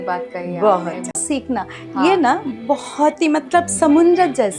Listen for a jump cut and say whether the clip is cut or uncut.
cut